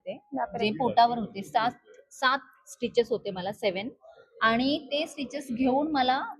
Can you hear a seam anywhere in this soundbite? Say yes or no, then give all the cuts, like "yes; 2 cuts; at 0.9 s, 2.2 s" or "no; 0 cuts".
no; 0 cuts